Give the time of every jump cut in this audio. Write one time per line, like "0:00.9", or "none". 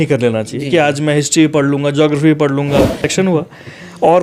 0:03.0